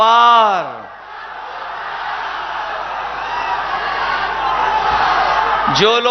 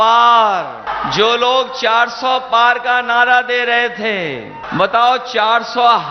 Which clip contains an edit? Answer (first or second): second